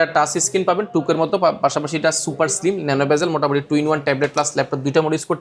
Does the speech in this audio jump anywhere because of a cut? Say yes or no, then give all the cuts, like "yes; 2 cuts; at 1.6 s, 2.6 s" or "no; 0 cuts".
no; 0 cuts